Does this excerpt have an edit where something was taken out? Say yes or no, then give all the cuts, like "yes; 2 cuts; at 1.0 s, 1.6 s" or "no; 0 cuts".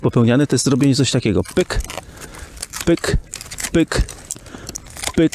no; 0 cuts